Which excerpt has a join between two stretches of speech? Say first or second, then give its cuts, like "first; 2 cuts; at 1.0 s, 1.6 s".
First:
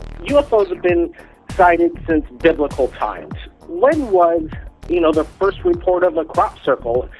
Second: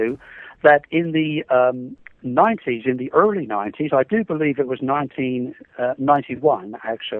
first; 1 cut; at 4.6 s